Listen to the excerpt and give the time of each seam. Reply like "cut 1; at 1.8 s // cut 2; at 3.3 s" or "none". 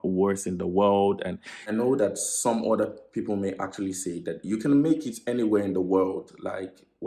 cut 1; at 1.6 s